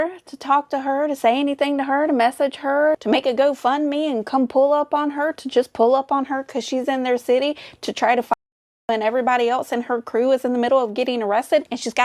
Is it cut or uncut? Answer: uncut